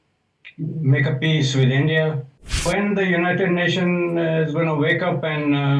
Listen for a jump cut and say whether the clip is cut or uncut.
cut